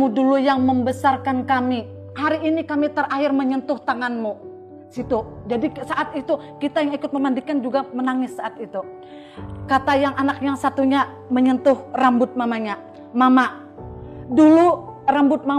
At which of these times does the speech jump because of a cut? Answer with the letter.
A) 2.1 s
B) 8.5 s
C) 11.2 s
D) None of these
A